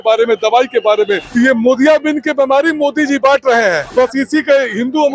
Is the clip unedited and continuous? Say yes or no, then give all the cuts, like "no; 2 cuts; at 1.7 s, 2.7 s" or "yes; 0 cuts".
no; 2 cuts; at 1.2 s, 3.8 s